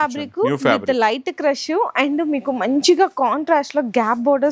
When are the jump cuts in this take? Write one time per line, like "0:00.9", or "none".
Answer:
none